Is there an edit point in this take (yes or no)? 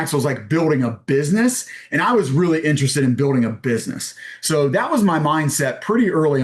no